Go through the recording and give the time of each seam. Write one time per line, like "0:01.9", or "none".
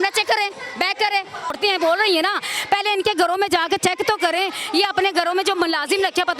0:01.5